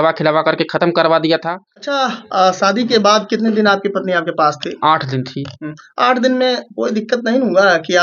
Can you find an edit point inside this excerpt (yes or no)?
yes